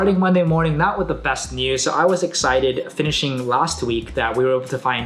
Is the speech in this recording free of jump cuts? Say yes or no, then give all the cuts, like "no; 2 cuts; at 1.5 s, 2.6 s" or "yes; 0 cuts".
yes; 0 cuts